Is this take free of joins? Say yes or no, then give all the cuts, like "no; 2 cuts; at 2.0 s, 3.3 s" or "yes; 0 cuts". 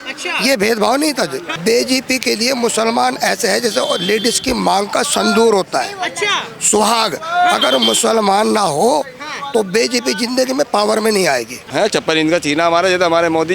no; 2 cuts; at 1.5 s, 11.6 s